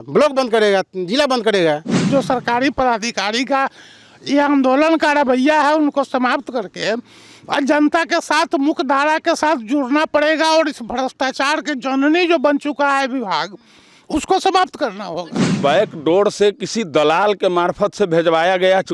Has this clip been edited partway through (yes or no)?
yes